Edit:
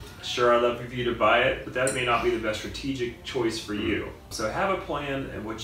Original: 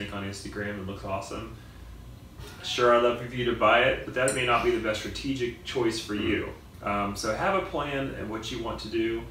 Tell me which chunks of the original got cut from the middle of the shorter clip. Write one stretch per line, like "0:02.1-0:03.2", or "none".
0:06.7-0:07.2